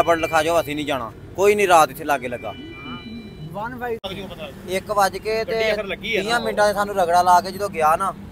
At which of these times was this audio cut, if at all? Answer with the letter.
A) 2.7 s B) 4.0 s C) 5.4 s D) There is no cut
B